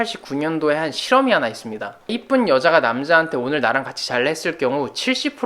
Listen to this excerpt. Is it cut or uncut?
cut